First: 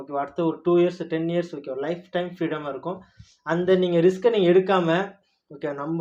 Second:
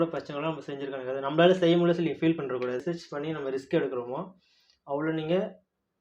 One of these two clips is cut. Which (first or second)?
second